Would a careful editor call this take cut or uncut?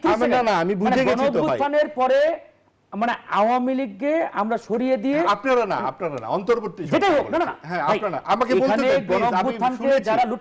uncut